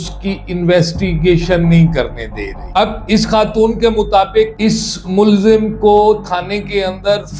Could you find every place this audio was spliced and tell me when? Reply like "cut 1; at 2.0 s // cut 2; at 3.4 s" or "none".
cut 1; at 2.6 s